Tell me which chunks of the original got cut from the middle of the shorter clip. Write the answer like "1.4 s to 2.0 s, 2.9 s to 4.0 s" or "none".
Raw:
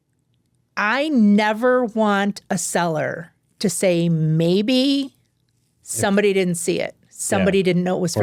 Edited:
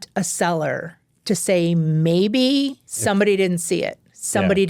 5.2 s to 5.8 s